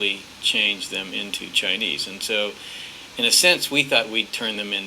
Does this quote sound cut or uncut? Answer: cut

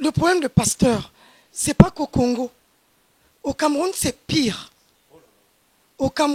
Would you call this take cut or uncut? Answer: uncut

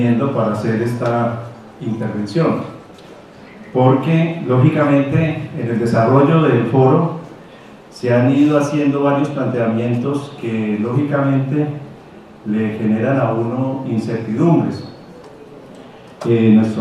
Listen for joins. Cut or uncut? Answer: cut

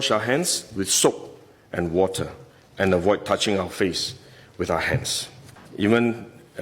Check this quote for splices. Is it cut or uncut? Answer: cut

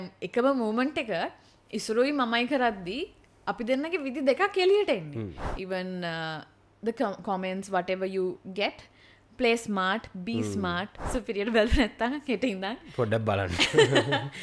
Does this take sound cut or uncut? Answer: cut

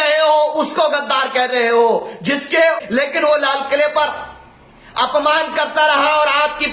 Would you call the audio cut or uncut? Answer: cut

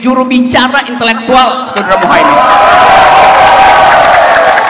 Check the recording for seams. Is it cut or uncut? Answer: uncut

